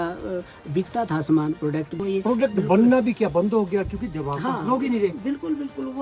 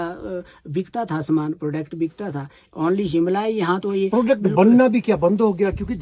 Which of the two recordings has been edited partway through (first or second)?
first